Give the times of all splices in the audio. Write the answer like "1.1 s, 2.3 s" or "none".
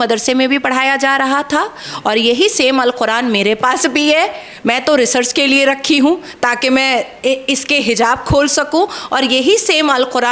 none